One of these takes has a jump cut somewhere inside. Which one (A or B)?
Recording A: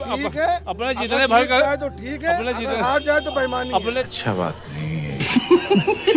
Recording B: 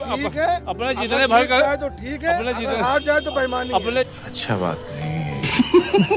A